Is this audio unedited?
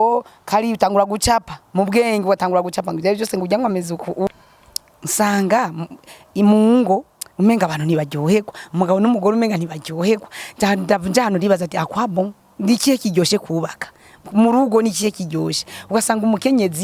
no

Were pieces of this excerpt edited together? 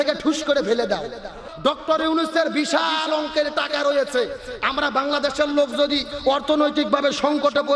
yes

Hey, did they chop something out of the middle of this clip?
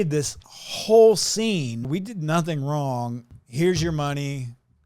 yes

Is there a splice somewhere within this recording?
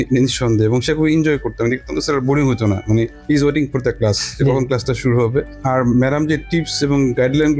no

